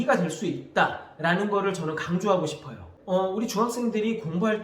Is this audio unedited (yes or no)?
no